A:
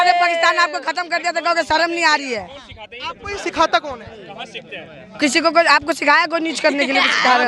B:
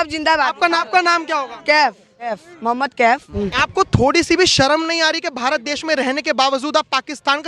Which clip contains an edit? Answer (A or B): B